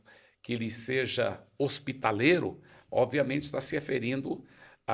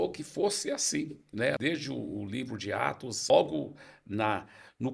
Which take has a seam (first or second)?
second